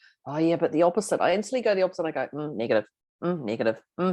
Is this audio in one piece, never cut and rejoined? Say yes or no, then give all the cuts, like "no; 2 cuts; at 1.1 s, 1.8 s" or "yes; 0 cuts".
no; 1 cut; at 3.0 s